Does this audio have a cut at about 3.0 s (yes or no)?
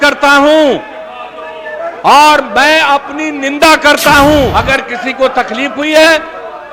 no